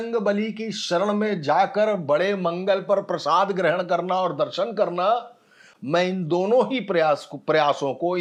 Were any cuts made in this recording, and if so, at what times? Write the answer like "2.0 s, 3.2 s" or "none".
none